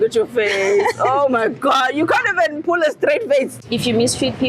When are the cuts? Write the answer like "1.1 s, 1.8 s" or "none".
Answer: 3.6 s